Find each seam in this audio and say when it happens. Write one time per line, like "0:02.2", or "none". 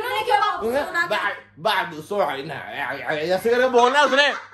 0:03.6

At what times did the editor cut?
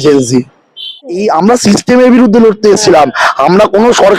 0:01.0

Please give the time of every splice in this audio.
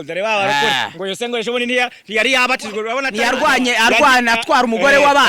0:03.5

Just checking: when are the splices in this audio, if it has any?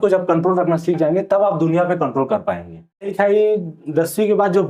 0:03.1

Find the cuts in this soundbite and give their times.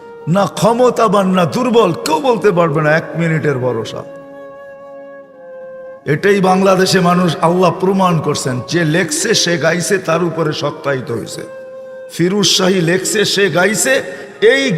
0:13.8

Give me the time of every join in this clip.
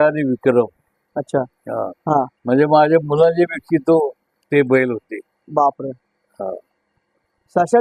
none

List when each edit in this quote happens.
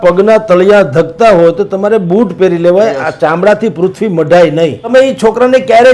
0:04.9

